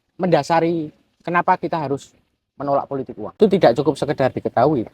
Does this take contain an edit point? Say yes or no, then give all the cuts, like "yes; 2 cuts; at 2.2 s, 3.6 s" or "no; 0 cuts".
yes; 1 cut; at 3.4 s